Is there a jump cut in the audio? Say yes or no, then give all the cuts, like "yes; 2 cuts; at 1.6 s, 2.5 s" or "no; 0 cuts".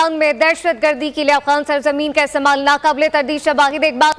no; 0 cuts